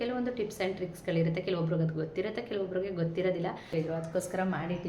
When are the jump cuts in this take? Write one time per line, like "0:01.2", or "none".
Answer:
0:03.7